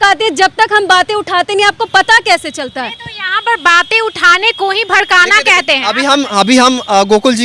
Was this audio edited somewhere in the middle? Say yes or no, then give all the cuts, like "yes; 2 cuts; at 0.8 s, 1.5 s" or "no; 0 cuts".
no; 0 cuts